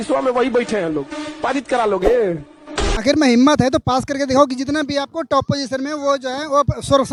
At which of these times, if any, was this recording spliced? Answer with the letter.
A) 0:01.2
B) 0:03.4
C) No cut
C